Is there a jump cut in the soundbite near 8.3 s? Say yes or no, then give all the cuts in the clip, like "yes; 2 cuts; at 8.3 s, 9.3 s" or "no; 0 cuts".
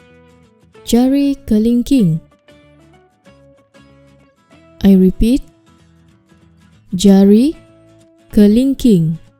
no; 2 cuts; at 2.2 s, 4.6 s